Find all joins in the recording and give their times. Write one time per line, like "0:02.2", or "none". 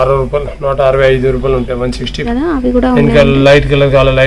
0:02.3